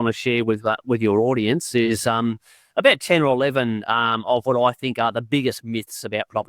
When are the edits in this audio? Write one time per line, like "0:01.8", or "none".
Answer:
none